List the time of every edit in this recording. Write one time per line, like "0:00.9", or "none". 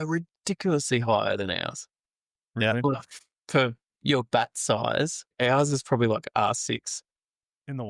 0:05.3